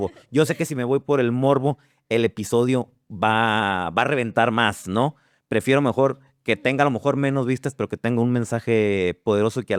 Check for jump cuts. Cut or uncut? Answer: uncut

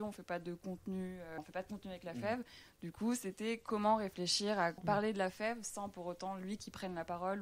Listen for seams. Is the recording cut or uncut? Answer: cut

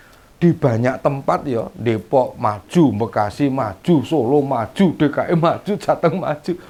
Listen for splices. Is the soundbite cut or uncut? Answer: uncut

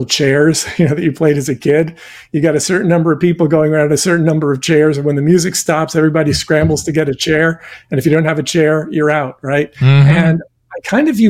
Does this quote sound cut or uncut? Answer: uncut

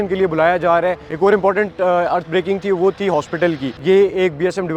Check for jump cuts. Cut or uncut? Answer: cut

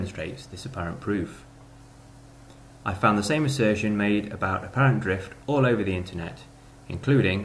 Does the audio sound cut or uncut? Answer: uncut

